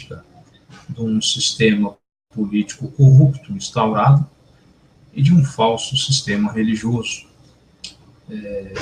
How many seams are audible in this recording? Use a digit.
1